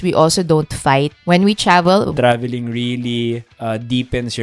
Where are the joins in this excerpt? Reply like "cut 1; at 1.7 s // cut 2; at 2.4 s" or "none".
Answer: cut 1; at 1.2 s // cut 2; at 2.1 s // cut 3; at 3.5 s